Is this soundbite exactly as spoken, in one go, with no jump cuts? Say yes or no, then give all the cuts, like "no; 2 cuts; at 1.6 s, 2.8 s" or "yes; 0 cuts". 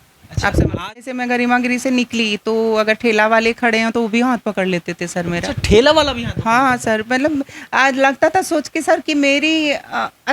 no; 1 cut; at 1.1 s